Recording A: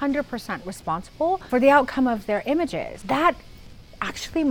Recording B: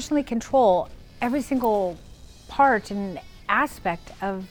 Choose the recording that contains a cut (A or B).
A